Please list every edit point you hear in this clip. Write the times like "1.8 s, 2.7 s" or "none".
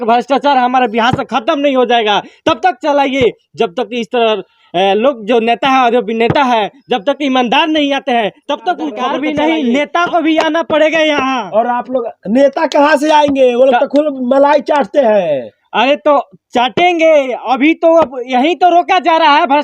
9.0 s